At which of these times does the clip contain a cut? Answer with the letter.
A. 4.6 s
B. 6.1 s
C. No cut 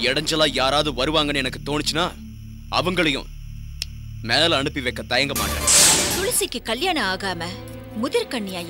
B